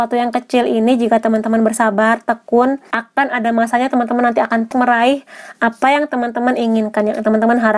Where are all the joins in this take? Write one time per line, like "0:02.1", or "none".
0:02.9
0:04.7